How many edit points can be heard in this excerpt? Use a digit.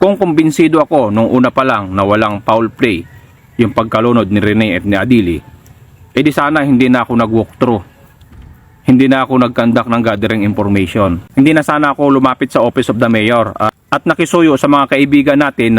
0